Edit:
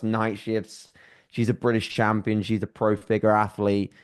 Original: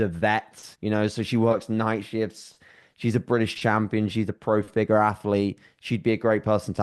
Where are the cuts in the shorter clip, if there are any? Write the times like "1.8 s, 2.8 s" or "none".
none